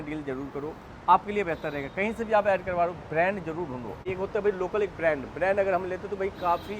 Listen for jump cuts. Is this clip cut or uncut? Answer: cut